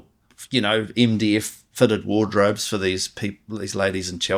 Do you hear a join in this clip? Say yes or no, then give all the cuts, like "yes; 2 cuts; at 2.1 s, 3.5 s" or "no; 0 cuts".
no; 0 cuts